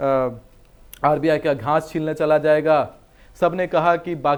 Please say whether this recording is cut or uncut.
uncut